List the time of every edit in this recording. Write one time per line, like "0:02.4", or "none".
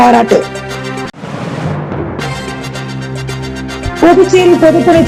none